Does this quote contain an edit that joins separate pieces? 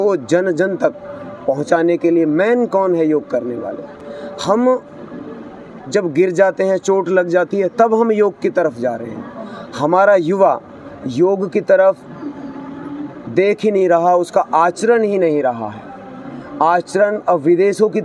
no; 0 cuts

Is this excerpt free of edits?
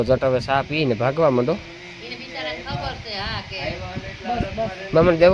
yes; 0 cuts

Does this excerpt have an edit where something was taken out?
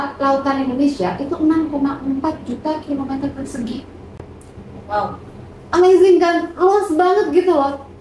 no; 0 cuts

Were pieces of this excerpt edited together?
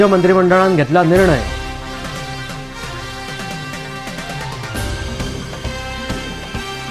no; 0 cuts

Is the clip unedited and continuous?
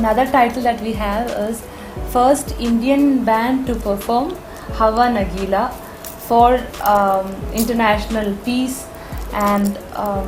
yes; 0 cuts

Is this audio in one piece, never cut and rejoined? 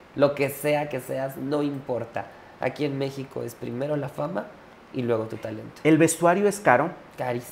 yes; 0 cuts

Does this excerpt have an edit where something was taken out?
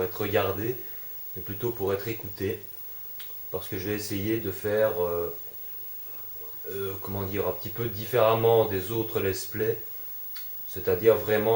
yes; 1 cut; at 9.5 s

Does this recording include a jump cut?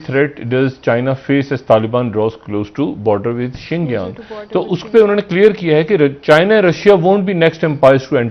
no; 0 cuts

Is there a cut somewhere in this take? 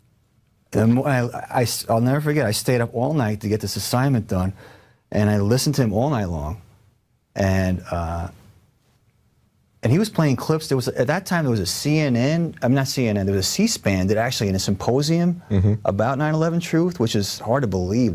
no; 0 cuts

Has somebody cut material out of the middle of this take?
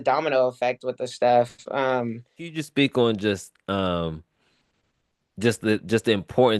yes; 1 cut; at 2.6 s

